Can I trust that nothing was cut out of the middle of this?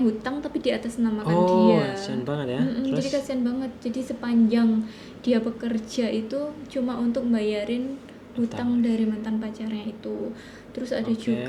yes; 0 cuts

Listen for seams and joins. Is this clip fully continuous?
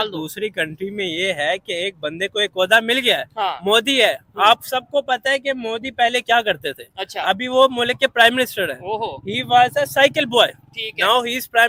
yes; 0 cuts

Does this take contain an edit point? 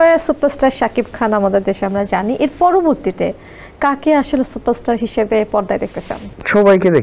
no; 0 cuts

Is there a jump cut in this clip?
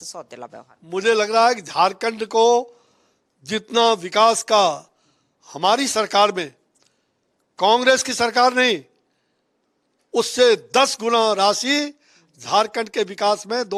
no; 0 cuts

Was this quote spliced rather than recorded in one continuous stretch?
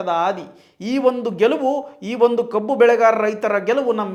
no; 0 cuts

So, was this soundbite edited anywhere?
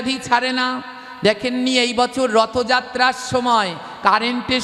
no; 0 cuts

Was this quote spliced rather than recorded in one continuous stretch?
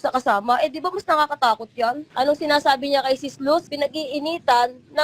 yes; 2 cuts; at 2.0 s, 3.7 s

